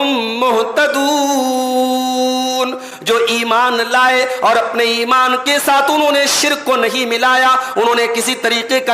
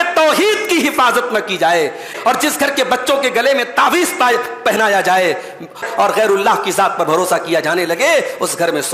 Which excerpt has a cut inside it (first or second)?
second